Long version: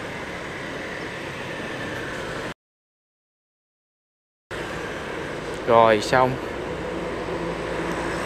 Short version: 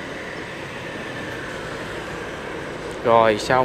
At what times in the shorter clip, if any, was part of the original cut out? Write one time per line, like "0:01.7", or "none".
0:01.9